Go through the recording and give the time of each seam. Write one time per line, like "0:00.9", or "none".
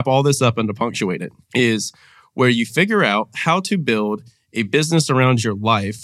0:01.3

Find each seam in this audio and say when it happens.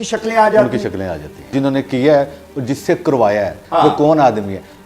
0:01.4
0:03.6

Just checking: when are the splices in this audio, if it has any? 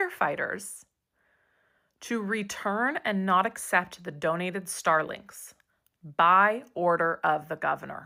none

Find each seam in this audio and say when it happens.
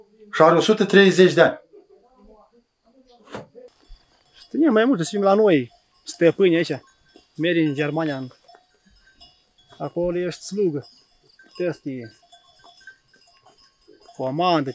0:03.8

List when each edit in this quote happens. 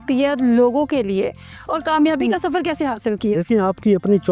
none

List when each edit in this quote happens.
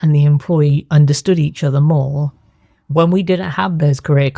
none

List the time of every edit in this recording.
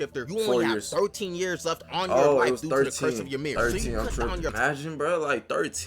0:04.5

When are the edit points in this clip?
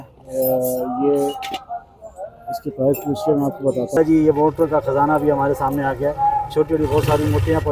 0:03.9

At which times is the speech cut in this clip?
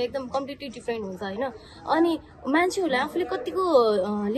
none

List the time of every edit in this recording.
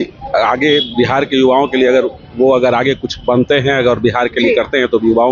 none

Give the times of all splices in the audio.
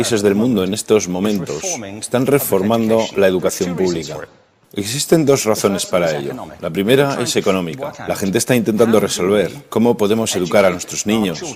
0:05.1

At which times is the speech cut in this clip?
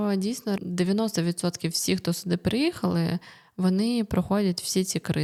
none

